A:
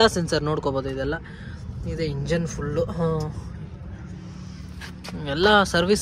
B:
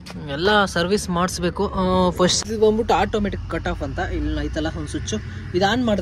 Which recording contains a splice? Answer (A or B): B